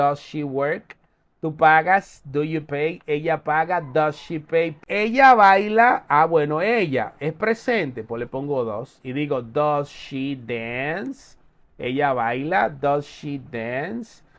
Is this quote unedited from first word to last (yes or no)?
no